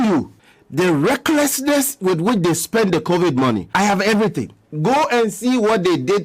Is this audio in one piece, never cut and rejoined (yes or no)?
no